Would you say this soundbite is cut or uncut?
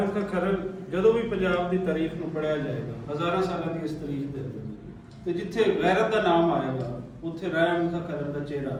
uncut